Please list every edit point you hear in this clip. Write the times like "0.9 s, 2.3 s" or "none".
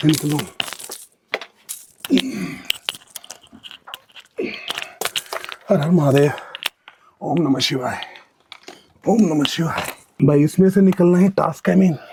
none